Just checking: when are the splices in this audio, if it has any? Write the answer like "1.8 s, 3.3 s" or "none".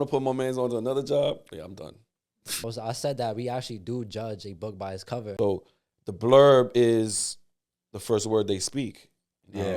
2.6 s, 5.3 s

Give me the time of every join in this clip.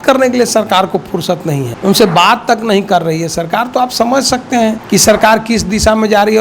1.7 s, 4.8 s

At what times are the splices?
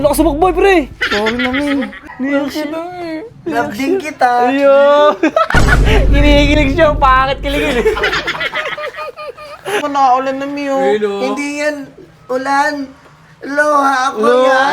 2.0 s, 9.8 s

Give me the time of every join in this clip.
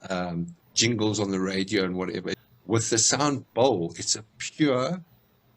2.4 s

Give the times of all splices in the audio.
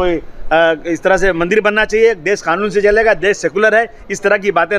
none

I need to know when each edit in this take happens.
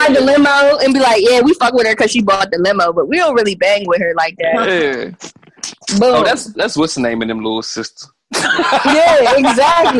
none

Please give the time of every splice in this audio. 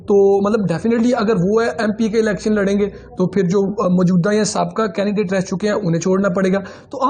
none

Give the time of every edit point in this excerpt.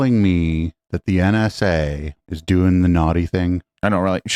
none

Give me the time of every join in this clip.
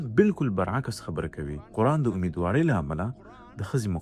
none

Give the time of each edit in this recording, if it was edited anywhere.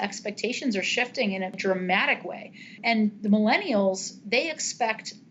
1.6 s, 2.8 s

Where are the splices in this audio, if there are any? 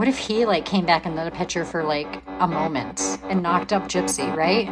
none

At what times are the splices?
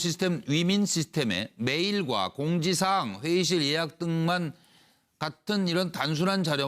0.9 s

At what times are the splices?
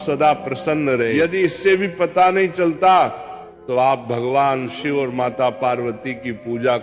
1.1 s

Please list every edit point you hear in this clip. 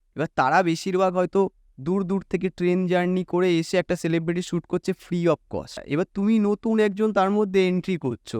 5.8 s

